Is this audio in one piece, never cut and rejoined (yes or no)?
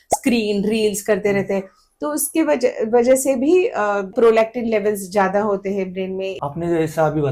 no